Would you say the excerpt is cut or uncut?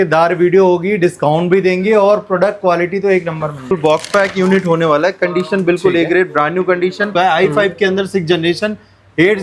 cut